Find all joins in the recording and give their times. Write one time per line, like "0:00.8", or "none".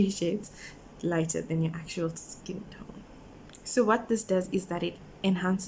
0:03.3